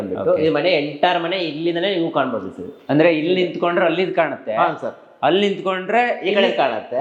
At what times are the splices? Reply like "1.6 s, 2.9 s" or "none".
none